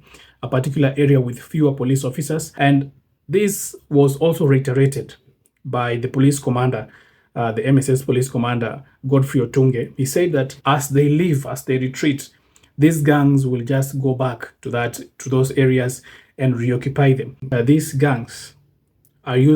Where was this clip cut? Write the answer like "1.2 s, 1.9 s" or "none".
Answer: 2.5 s, 10.5 s, 17.4 s